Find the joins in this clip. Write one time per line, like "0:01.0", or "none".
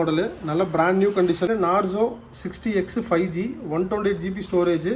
0:01.5